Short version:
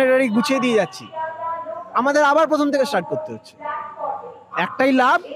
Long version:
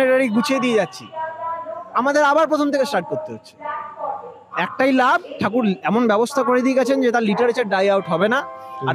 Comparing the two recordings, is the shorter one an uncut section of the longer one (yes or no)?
yes